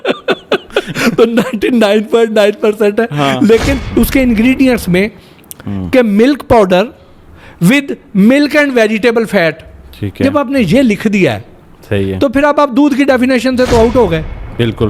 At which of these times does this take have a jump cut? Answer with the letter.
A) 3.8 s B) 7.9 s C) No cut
A